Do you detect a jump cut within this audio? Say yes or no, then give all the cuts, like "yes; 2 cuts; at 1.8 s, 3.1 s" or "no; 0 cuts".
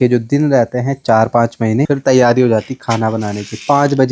yes; 1 cut; at 1.9 s